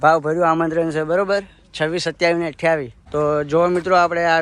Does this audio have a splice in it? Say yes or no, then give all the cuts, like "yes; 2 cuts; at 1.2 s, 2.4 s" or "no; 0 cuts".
yes; 1 cut; at 3.0 s